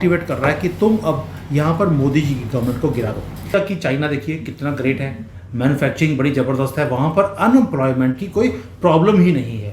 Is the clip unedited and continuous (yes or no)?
no